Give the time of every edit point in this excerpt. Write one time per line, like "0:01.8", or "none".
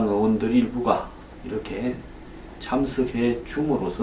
none